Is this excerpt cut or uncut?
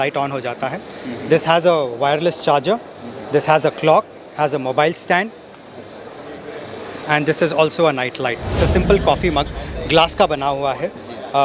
cut